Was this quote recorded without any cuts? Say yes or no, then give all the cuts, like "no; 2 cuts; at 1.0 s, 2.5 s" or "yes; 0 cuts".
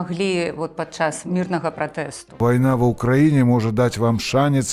no; 2 cuts; at 1.2 s, 2.4 s